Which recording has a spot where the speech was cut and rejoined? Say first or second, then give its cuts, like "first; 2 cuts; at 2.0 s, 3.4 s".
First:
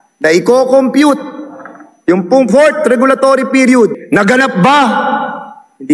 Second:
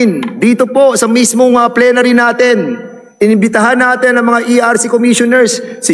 first; 1 cut; at 4.0 s